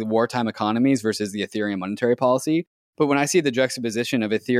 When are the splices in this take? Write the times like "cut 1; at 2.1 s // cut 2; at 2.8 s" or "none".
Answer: cut 1; at 2.8 s